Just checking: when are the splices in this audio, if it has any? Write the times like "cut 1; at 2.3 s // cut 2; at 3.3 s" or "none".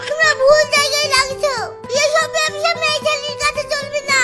cut 1; at 1.8 s